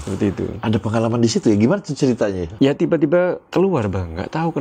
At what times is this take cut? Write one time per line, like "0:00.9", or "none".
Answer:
0:02.5
0:03.4